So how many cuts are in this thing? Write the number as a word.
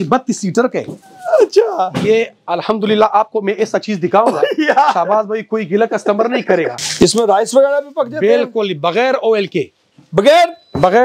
one